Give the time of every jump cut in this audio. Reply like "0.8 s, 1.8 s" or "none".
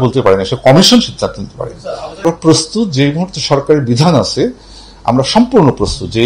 2.2 s